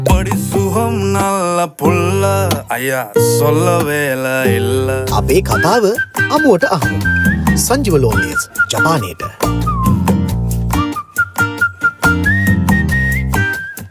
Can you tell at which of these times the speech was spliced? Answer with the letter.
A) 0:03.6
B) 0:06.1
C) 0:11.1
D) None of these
D